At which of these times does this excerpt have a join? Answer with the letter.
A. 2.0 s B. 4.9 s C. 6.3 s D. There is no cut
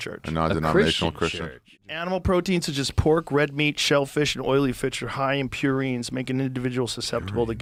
D